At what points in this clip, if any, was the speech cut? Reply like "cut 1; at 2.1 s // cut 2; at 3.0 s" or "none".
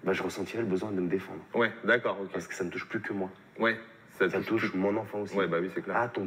none